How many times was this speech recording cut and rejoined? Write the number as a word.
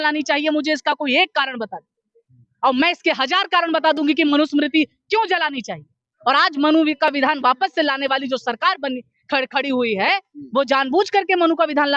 zero